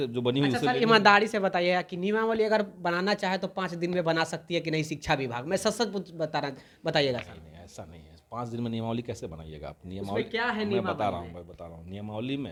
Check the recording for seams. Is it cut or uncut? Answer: uncut